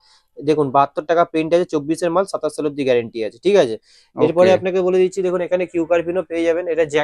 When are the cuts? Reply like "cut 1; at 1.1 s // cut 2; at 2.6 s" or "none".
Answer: none